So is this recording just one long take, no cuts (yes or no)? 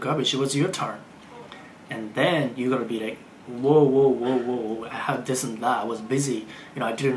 yes